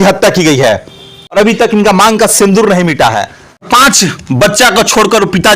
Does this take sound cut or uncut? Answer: cut